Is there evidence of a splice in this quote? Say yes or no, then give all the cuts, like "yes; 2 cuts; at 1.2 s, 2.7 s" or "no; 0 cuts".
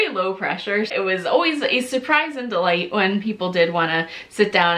yes; 1 cut; at 0.9 s